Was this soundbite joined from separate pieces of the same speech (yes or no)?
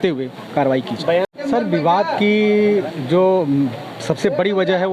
yes